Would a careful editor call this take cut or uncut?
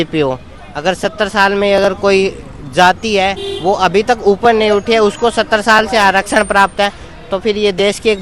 uncut